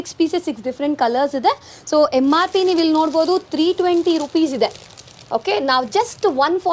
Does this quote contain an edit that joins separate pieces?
no; 0 cuts

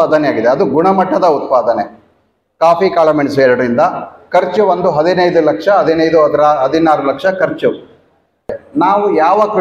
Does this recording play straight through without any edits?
no; 1 cut; at 8.6 s

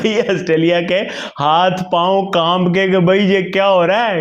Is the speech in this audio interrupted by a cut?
no; 0 cuts

